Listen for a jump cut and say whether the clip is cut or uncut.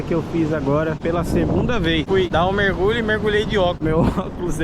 cut